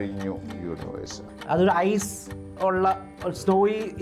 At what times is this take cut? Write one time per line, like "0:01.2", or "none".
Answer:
0:01.2